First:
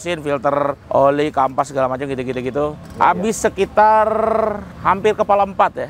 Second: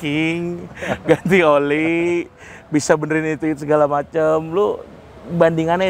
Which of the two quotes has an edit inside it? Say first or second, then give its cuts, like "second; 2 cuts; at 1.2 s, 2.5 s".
first; 3 cuts; at 0.8 s, 2.8 s, 4.7 s